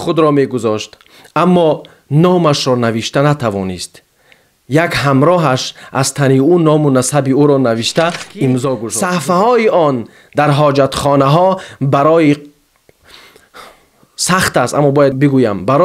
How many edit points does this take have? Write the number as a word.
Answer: one